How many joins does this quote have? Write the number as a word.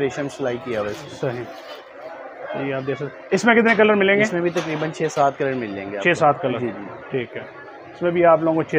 zero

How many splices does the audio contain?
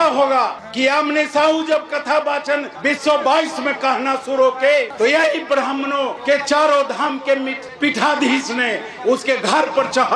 zero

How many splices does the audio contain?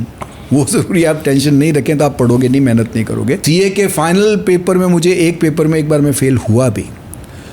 one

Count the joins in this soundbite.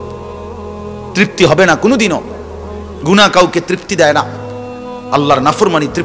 zero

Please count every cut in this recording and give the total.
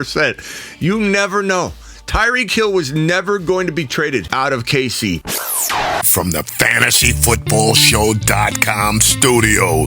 one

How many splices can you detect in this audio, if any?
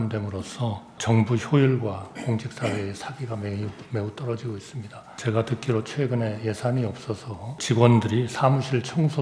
three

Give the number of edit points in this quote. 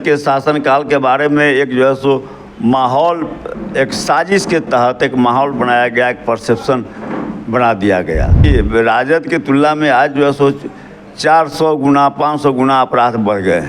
one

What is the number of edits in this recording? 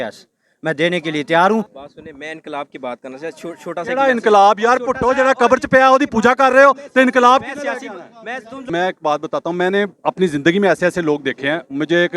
two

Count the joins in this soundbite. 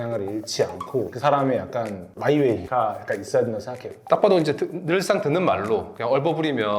one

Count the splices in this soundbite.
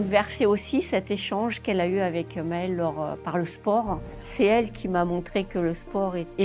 one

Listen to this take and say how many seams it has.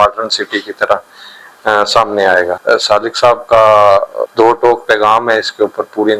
two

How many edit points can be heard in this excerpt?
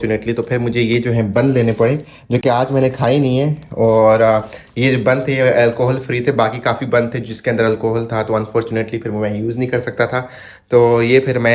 zero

